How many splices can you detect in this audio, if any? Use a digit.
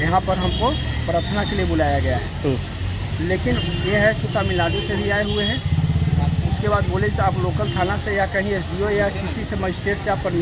0